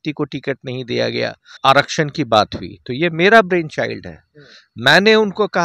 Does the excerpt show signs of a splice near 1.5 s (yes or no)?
yes